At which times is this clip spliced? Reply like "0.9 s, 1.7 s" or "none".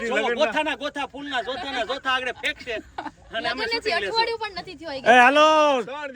none

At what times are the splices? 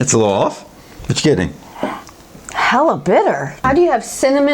2.4 s, 3.5 s

